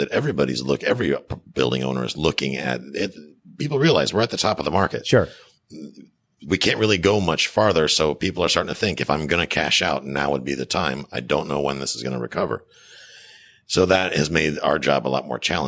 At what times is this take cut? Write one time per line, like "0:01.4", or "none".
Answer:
none